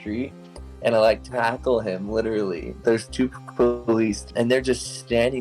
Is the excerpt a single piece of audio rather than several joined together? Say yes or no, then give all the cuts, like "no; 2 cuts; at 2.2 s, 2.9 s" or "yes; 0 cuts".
no; 1 cut; at 4.2 s